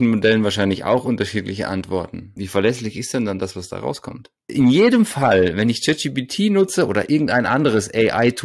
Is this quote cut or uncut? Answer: cut